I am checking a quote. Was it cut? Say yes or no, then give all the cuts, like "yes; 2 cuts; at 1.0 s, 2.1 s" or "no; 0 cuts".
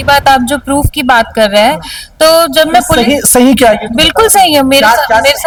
no; 0 cuts